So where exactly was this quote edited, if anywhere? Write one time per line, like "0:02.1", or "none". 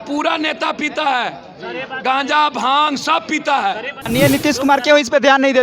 0:04.1